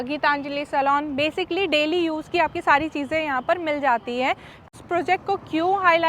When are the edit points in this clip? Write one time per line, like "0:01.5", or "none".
0:04.7